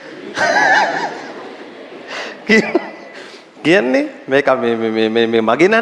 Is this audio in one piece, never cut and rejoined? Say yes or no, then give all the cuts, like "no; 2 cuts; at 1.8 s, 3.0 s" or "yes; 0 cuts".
yes; 0 cuts